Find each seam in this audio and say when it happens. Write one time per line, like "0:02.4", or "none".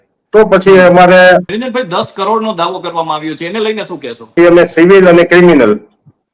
0:01.5
0:04.3